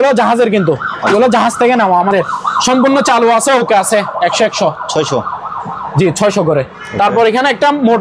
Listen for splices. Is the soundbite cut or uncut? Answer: uncut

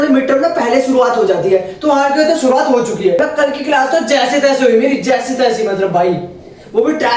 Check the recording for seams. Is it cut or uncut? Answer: cut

